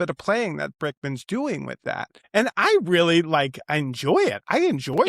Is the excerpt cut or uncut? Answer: cut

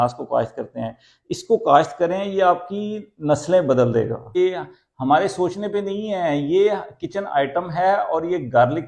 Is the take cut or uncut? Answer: cut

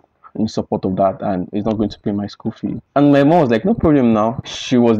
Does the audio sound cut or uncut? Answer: uncut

